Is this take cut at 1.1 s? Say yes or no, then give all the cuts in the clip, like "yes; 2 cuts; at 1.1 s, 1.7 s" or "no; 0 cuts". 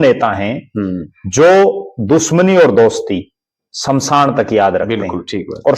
no; 0 cuts